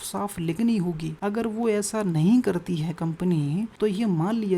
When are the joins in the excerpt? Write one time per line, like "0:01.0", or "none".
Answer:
0:01.1
0:03.7